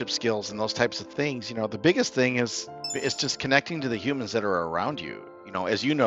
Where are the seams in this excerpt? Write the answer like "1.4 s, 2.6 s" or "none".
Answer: none